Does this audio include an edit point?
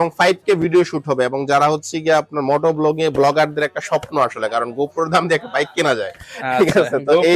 no; 0 cuts

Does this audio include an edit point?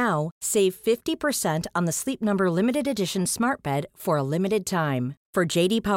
no; 0 cuts

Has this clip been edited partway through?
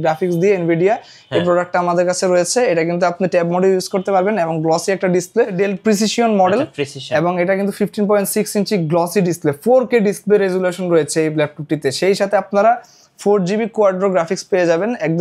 yes; 1 cut; at 5.5 s

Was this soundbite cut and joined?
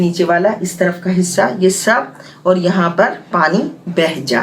no; 0 cuts

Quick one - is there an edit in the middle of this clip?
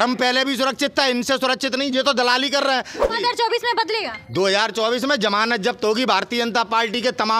yes; 1 cut; at 3.0 s

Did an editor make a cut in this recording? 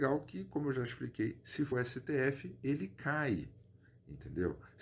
yes; 1 cut; at 1.7 s

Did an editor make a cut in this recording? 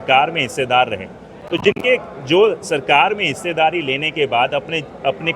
no; 0 cuts

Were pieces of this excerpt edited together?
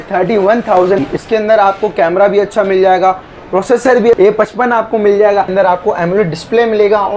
yes; 3 cuts; at 1.0 s, 4.1 s, 5.5 s

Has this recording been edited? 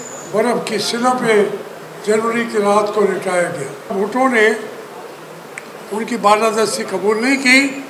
yes; 1 cut; at 3.9 s

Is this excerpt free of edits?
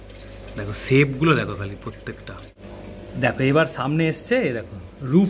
no; 1 cut; at 2.8 s

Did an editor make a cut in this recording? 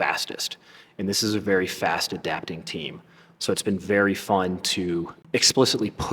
yes; 1 cut; at 5.2 s

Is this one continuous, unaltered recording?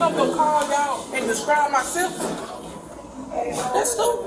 yes; 0 cuts

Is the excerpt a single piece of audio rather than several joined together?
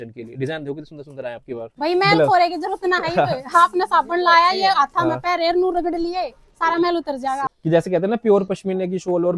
no; 2 cuts; at 1.7 s, 7.5 s

